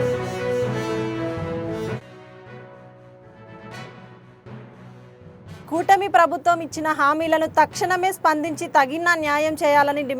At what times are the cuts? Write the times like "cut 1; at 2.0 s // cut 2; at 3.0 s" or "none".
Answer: none